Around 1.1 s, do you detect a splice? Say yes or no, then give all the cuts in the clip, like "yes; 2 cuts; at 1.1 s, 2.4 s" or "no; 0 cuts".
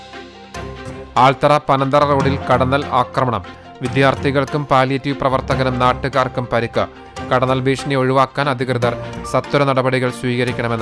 yes; 1 cut; at 1.1 s